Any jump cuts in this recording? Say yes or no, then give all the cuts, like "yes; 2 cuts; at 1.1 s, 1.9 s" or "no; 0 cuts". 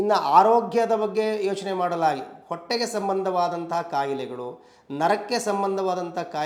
no; 0 cuts